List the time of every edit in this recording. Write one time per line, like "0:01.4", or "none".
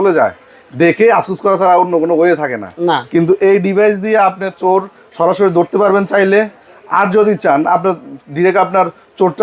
none

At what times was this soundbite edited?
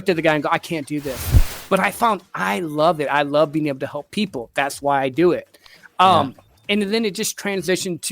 0:01.5

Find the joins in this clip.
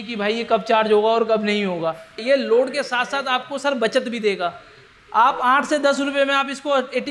0:02.2

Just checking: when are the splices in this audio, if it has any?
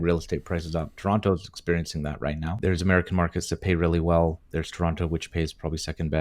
0:02.6

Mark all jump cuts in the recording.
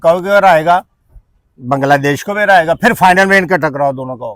none

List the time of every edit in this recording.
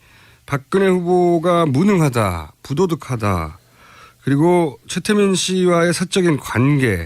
none

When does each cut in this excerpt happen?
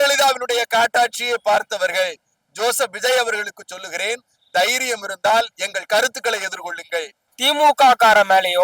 0:07.2

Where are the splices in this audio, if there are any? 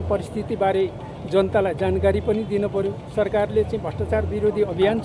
none

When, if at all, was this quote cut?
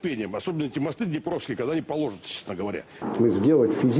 0:03.0

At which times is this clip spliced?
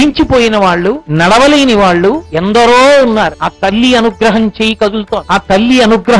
0:01.0
0:02.3
0:03.4
0:05.2

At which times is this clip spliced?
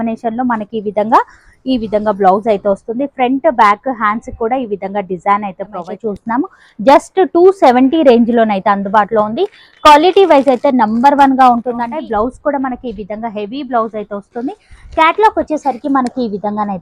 0:05.9
0:11.9

